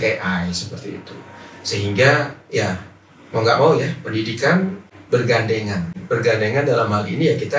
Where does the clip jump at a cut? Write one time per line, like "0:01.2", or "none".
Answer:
0:04.9
0:06.0